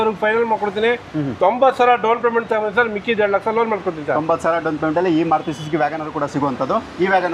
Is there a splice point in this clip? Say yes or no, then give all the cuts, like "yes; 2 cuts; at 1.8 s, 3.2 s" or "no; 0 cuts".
no; 0 cuts